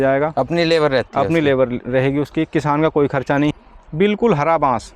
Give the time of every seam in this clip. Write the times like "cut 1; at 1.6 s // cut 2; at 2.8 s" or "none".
cut 1; at 3.5 s